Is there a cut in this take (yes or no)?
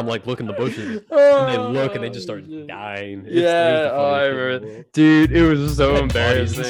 no